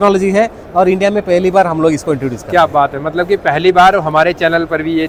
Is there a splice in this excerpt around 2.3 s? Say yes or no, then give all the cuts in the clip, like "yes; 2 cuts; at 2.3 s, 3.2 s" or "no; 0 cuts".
no; 0 cuts